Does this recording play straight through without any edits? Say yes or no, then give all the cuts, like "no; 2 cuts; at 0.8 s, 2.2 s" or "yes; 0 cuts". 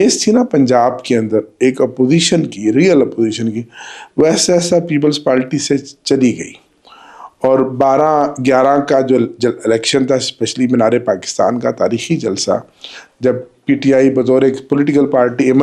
yes; 0 cuts